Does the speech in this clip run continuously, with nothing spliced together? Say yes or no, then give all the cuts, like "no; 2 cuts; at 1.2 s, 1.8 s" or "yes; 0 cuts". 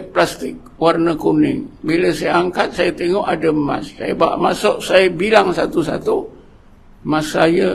yes; 0 cuts